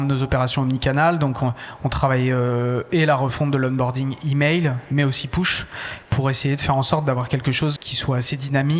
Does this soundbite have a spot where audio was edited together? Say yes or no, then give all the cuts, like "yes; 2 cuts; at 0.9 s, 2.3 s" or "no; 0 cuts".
yes; 1 cut; at 7.9 s